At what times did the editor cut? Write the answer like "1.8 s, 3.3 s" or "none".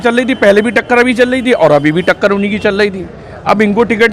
none